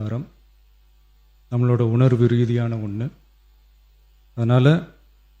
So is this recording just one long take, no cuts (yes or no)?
yes